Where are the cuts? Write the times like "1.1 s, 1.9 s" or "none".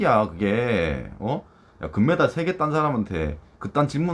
none